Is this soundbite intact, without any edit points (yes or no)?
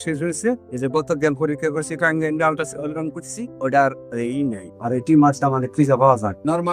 yes